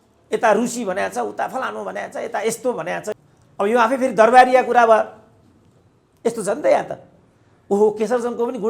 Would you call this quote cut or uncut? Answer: cut